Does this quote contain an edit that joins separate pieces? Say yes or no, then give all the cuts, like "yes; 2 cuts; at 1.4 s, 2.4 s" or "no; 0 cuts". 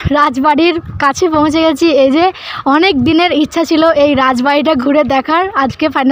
no; 0 cuts